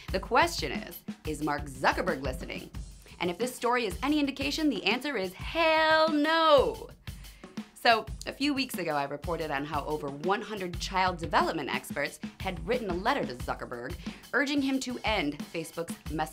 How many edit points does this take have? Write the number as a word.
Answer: one